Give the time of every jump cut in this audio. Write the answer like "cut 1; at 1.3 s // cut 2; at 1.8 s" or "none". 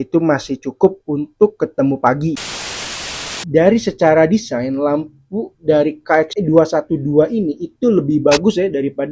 cut 1; at 2.8 s